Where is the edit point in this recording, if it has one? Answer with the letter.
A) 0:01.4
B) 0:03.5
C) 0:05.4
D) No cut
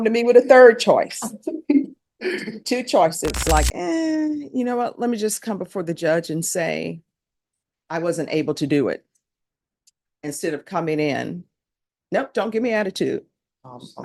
B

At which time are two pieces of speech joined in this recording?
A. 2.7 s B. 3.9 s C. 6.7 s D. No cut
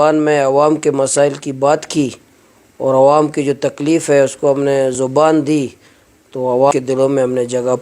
C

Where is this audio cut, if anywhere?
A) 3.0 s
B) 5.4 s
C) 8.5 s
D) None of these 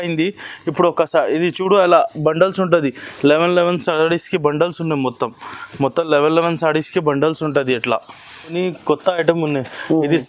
C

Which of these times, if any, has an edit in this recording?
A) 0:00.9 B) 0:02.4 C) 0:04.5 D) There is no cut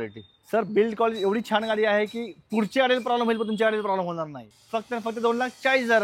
C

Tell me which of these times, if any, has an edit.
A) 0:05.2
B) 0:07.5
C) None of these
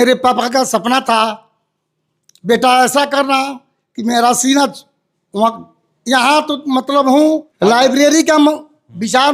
B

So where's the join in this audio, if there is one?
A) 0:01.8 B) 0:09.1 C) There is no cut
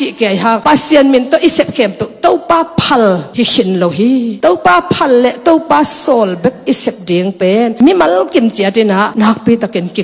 B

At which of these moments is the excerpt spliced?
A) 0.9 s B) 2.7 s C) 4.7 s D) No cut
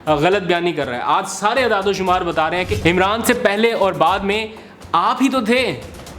B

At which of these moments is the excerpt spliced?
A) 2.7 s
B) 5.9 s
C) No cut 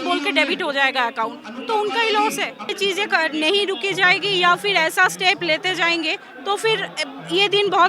A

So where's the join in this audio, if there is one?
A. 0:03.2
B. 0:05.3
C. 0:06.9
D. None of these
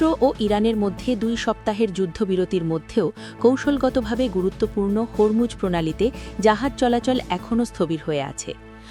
D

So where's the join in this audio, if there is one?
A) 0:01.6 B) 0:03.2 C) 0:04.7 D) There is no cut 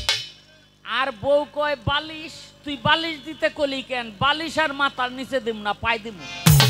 D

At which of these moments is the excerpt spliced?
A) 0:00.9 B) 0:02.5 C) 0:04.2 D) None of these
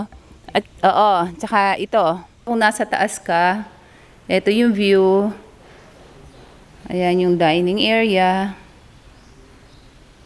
B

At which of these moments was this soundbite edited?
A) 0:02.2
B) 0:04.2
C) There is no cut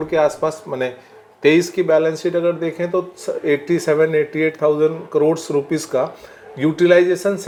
C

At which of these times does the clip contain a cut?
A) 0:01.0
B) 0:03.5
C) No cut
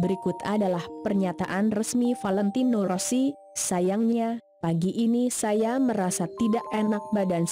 C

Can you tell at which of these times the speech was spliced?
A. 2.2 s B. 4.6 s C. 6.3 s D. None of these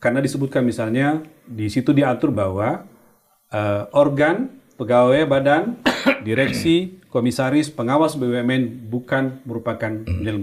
D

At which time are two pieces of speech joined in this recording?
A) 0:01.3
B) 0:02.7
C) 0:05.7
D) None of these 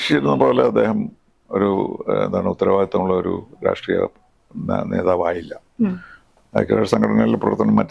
D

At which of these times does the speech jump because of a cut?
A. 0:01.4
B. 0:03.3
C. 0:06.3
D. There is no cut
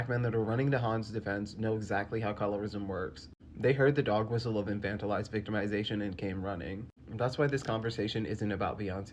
D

